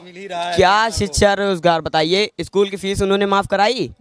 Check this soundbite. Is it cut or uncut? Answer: uncut